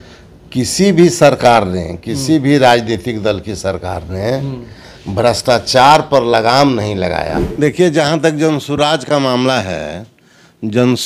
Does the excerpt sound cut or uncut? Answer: cut